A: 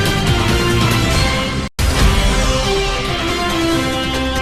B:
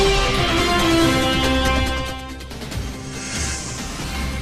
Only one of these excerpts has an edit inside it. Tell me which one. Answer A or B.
A